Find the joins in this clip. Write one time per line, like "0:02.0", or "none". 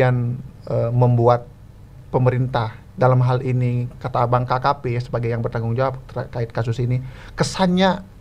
none